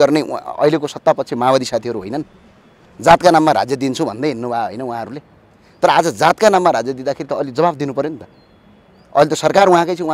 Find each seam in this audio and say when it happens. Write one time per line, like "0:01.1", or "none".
none